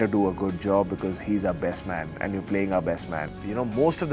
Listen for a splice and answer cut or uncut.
uncut